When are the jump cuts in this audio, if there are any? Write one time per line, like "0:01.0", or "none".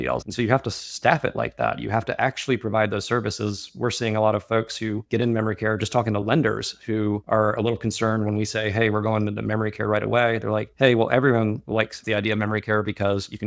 0:12.0